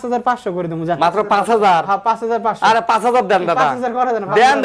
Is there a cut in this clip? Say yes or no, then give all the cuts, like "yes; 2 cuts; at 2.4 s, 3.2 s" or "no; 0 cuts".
no; 0 cuts